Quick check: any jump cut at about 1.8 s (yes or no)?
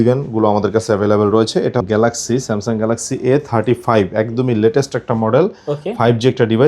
yes